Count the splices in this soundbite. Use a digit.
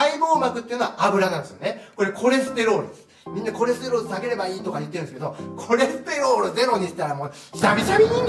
0